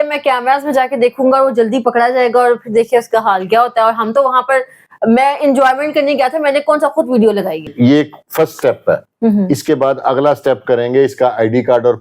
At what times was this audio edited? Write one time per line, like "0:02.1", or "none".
0:07.7